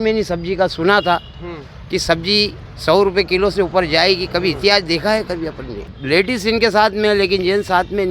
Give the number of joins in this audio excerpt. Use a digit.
1